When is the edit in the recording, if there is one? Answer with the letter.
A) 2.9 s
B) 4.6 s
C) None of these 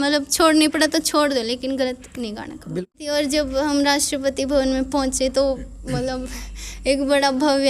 A